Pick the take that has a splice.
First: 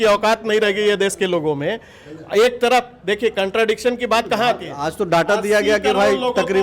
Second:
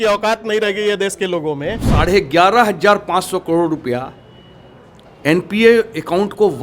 second; 1 cut; at 1.8 s

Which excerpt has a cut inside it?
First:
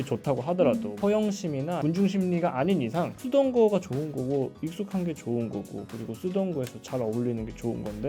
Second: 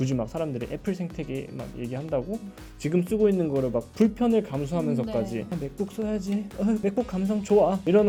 first; 1 cut; at 0.9 s

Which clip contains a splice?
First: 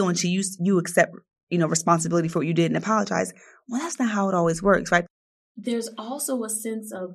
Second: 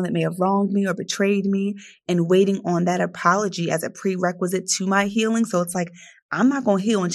first; 1 cut; at 5.0 s

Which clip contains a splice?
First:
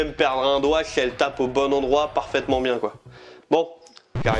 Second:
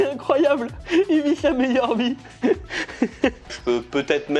second; 1 cut; at 3.4 s

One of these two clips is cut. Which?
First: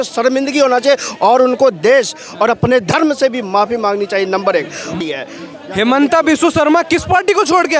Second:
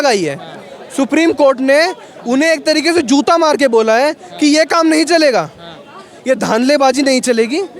first; 1 cut; at 5.0 s

